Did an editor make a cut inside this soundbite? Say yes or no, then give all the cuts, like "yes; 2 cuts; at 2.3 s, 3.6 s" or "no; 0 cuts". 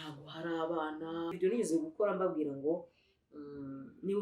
yes; 1 cut; at 1.4 s